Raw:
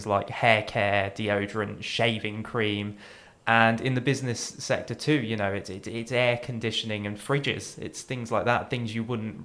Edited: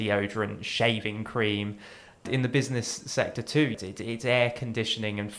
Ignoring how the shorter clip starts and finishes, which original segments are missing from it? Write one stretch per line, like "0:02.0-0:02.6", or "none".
0:03.4-0:03.8
0:05.3-0:05.6